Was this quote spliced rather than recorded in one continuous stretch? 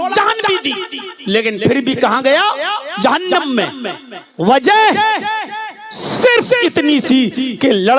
no; 0 cuts

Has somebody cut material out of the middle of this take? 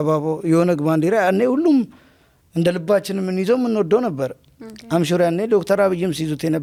no; 0 cuts

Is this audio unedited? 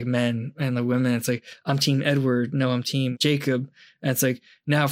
no; 1 cut; at 3.1 s

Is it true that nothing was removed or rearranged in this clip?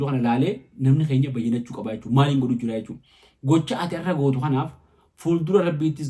yes; 0 cuts

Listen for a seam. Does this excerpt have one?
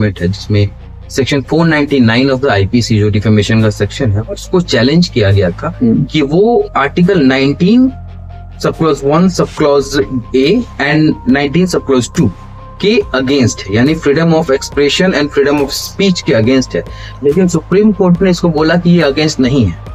no; 0 cuts

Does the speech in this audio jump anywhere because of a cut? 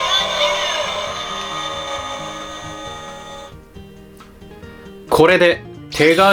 no; 0 cuts

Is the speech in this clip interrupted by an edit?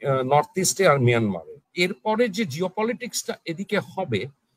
yes; 1 cut; at 1.6 s

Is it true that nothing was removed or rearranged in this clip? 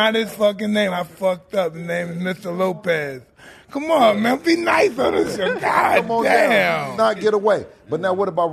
yes; 0 cuts

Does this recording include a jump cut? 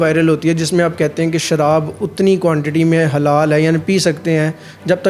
no; 0 cuts

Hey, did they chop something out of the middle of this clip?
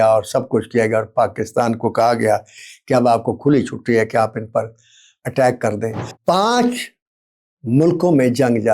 yes; 1 cut; at 6.1 s

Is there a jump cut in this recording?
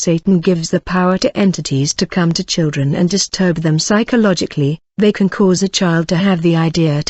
no; 0 cuts

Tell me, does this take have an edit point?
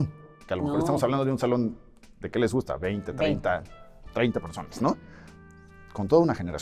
no; 0 cuts

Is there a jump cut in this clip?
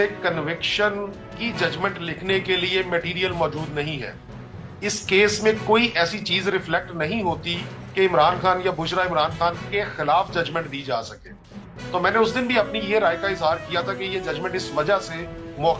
no; 0 cuts

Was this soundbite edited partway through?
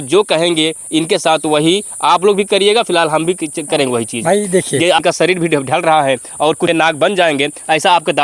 yes; 2 cuts; at 5.0 s, 6.7 s

